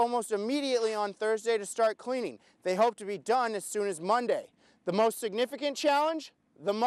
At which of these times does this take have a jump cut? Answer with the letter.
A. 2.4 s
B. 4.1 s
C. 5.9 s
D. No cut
D